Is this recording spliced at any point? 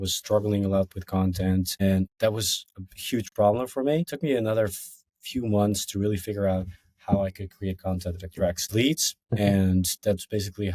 yes; 3 cuts; at 1.8 s, 4.1 s, 9.2 s

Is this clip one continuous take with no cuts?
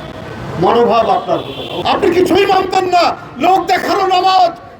no; 1 cut; at 1.7 s

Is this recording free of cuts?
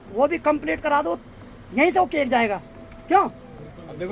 yes; 0 cuts

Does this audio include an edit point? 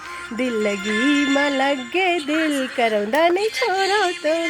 no; 0 cuts

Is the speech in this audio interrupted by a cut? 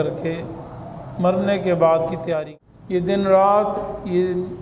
yes; 1 cut; at 2.4 s

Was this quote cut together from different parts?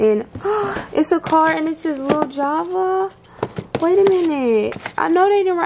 no; 0 cuts

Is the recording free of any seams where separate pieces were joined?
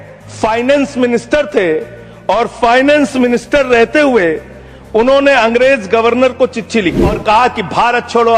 no; 1 cut; at 7.2 s

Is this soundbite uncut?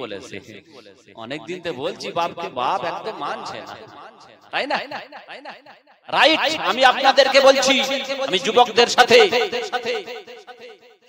yes; 0 cuts

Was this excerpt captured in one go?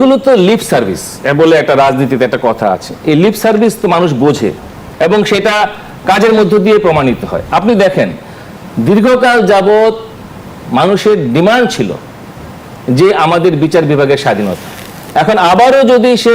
yes; 0 cuts

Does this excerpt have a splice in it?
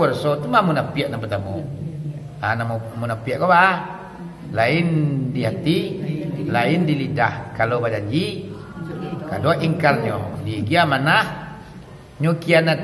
no; 0 cuts

